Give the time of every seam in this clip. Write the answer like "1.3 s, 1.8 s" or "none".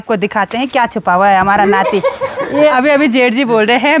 2.7 s